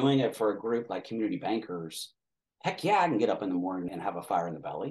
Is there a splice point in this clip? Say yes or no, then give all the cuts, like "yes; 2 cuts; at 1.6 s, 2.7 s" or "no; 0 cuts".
yes; 1 cut; at 3.9 s